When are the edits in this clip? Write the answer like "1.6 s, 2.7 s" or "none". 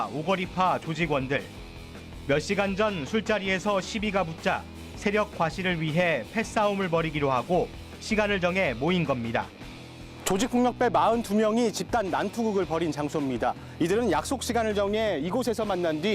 7.8 s